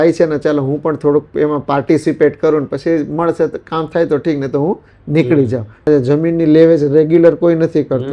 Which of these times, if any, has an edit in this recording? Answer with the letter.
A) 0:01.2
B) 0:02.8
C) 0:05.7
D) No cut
C